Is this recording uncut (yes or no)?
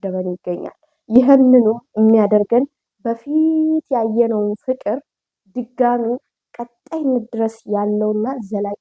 yes